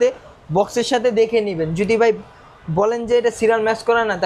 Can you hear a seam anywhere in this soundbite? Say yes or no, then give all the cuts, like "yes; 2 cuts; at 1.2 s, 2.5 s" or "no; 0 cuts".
no; 0 cuts